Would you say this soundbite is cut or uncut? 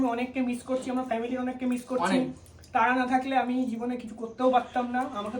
uncut